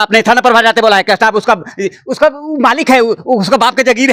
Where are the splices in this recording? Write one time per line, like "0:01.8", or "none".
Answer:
none